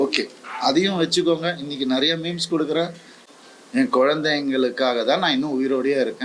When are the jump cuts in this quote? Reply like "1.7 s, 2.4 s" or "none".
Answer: 3.1 s